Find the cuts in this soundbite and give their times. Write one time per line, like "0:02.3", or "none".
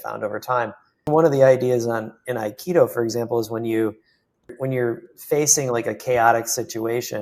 0:01.1
0:04.5